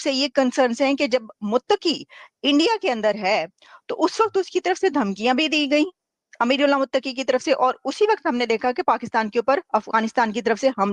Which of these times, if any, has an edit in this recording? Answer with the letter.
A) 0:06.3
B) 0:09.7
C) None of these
C